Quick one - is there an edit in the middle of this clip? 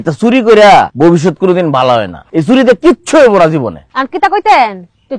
yes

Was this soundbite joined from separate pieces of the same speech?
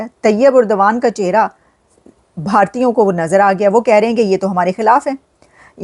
no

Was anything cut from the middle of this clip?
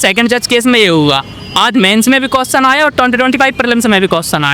no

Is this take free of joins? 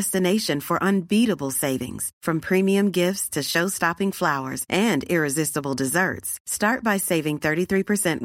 yes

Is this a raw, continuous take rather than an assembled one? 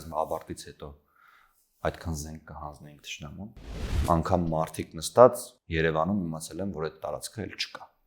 no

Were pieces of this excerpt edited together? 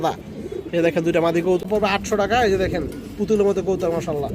yes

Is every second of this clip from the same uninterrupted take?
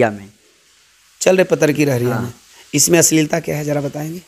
yes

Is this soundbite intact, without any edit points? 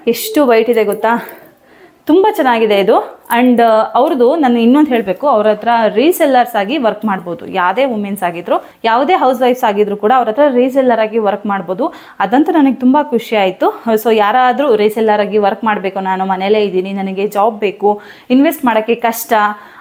yes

